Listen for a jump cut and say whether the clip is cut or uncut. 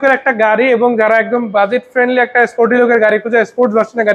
uncut